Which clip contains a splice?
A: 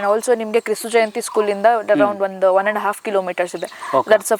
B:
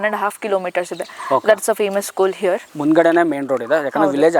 B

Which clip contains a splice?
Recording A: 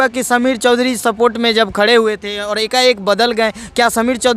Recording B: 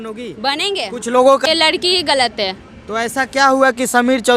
B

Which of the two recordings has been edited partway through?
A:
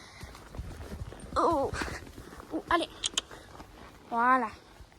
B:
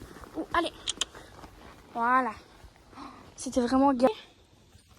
B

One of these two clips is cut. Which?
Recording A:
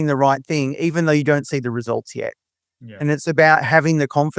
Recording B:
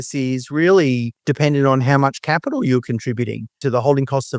B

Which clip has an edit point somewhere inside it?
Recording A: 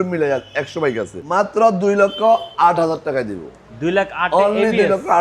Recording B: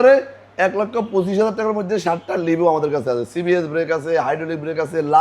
A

